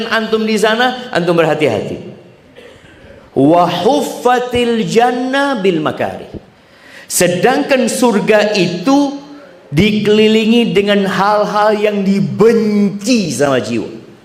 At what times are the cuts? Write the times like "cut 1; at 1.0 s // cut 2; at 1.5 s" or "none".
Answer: none